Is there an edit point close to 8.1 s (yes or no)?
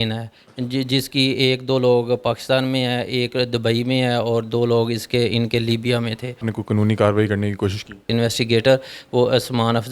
yes